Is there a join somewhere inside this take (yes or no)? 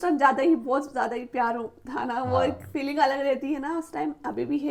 no